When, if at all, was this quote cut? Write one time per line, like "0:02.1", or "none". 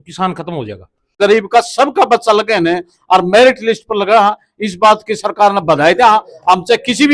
0:01.1

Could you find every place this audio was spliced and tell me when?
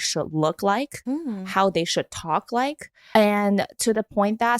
0:03.0

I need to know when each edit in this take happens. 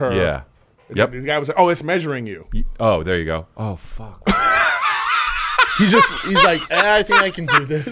none

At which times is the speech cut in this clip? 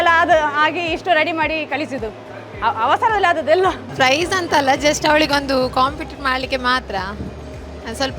0:03.8

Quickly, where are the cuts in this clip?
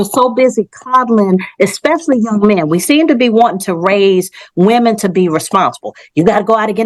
none

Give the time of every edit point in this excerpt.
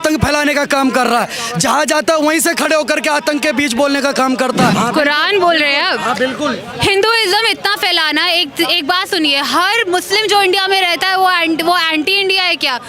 0:04.7

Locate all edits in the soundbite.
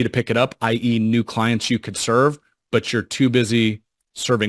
none

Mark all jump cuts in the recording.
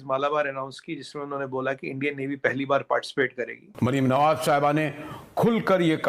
0:03.7

